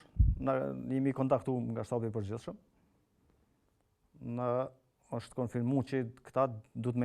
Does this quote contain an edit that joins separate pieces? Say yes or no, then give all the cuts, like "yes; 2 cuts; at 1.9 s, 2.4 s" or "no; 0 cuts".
no; 0 cuts